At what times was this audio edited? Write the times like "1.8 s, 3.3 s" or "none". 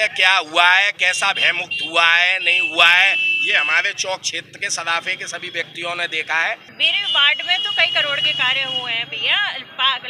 6.7 s